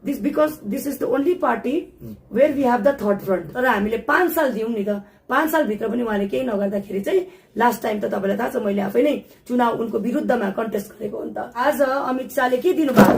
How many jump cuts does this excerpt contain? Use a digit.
2